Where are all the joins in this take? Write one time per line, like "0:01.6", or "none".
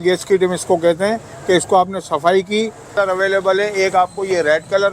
0:03.0